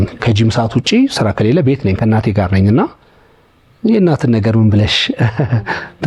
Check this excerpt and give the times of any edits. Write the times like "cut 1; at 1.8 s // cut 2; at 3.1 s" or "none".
none